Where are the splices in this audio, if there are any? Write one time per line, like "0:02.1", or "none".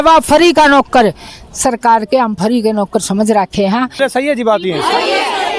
0:04.0